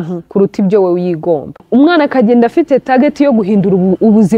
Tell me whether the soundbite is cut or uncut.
cut